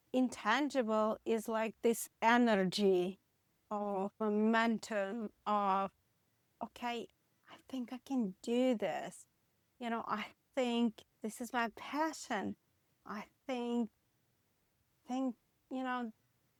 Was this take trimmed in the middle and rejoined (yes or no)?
no